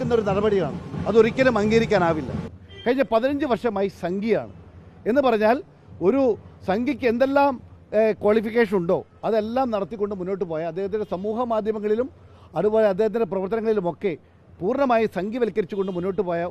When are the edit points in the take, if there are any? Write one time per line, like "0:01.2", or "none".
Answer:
0:02.2